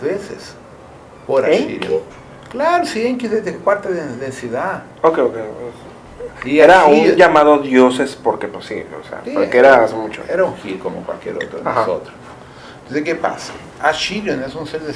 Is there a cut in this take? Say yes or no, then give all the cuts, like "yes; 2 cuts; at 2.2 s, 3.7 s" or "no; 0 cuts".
no; 0 cuts